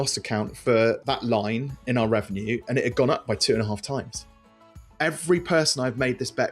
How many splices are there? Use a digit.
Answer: 2